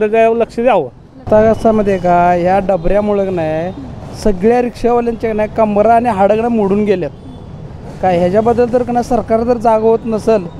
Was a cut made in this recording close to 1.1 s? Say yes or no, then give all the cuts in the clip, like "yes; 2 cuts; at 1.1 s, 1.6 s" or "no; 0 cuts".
yes; 1 cut; at 1.1 s